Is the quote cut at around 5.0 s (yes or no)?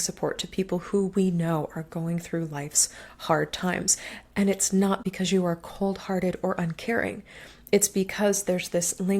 yes